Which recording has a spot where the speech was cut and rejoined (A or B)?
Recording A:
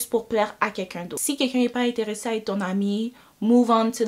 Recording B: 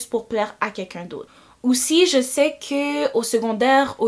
A